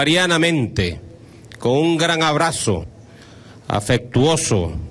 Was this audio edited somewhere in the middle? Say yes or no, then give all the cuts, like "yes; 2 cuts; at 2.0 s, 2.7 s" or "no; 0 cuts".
no; 0 cuts